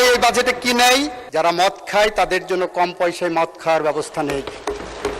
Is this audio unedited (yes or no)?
no